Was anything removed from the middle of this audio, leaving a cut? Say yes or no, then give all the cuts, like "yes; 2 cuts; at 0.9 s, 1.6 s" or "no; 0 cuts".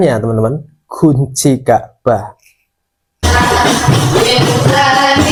no; 0 cuts